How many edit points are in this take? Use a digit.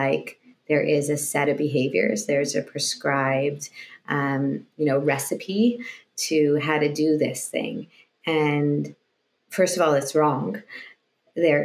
0